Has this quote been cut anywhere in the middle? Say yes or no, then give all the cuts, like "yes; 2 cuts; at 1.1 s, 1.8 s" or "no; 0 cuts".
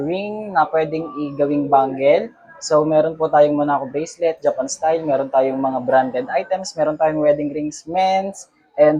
no; 0 cuts